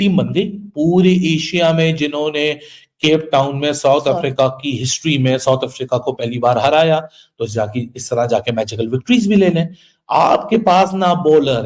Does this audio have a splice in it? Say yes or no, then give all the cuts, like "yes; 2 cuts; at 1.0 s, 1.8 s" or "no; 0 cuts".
no; 0 cuts